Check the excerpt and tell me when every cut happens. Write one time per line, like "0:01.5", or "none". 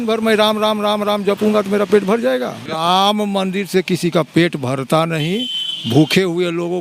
0:02.6